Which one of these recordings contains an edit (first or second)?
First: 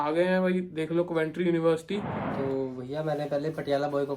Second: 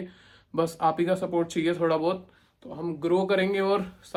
first